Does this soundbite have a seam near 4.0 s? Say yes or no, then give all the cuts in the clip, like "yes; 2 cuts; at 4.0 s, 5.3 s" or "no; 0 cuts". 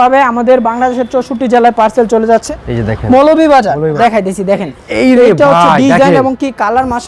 yes; 2 cuts; at 2.4 s, 4.0 s